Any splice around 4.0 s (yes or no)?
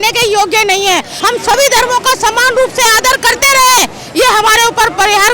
no